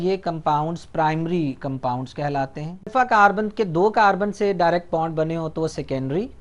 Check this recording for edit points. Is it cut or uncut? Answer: cut